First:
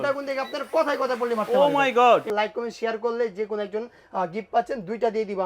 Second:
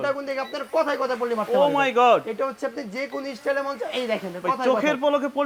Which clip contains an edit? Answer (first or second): first